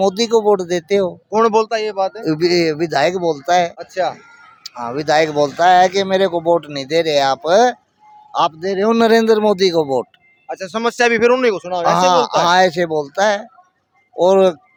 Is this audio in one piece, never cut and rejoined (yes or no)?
yes